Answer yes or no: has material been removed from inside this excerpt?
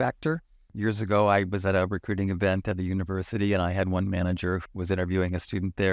yes